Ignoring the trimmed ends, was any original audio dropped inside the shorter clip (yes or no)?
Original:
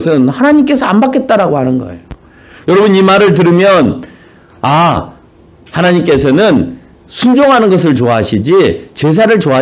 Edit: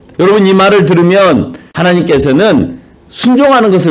yes